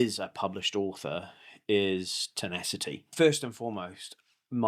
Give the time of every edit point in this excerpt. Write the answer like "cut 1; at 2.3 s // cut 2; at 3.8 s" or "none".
cut 1; at 3.0 s